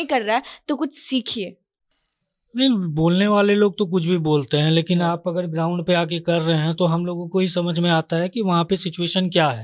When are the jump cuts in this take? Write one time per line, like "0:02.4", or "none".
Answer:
0:01.9